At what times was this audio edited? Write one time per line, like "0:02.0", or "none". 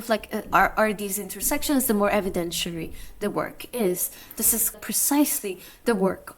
0:04.7

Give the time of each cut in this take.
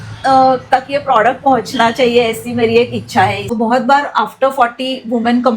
0:03.5

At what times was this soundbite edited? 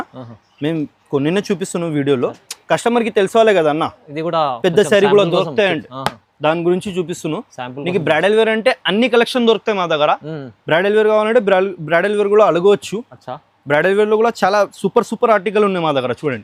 none

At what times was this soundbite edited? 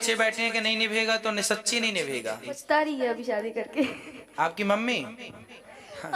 0:02.5

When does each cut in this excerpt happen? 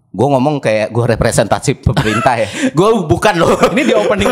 none

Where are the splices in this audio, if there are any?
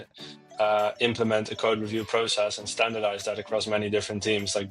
none

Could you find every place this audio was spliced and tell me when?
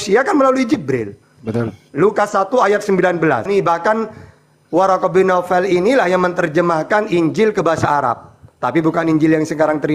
0:03.4

